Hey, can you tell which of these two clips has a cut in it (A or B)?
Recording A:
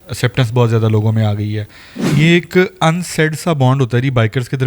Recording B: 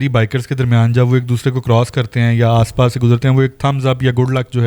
A